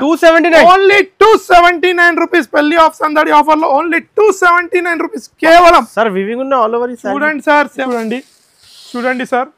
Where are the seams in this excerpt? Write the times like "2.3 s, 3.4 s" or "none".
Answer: 7.8 s